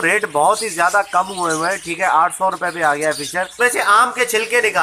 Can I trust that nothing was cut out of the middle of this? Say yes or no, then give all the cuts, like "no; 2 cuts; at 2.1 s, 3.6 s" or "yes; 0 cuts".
no; 1 cut; at 3.5 s